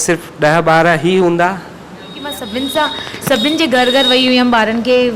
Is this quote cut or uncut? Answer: cut